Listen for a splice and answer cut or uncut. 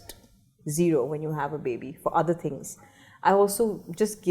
uncut